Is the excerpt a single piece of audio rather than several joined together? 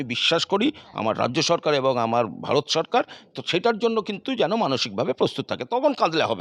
yes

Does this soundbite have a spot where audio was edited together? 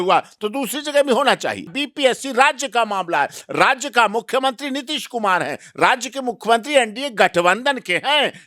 yes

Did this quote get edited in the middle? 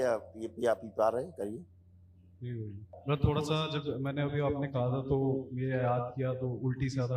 yes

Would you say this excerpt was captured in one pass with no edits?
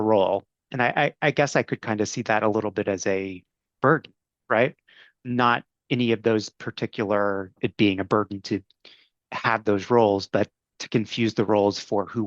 no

